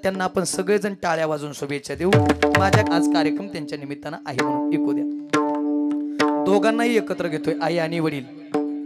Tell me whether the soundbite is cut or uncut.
cut